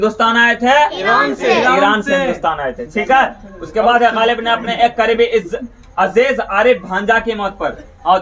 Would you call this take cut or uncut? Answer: uncut